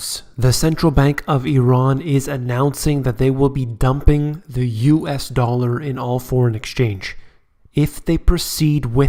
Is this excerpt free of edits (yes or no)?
yes